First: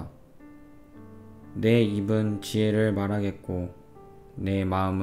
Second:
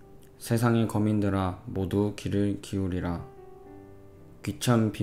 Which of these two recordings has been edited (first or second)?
first